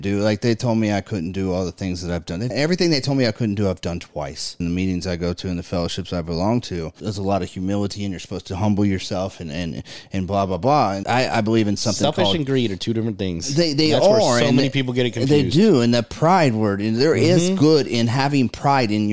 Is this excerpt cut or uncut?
cut